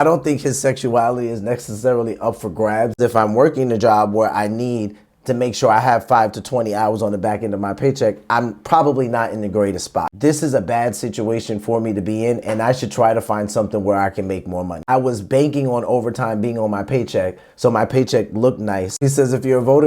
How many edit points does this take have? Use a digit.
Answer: 4